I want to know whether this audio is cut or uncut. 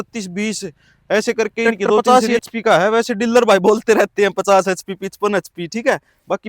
cut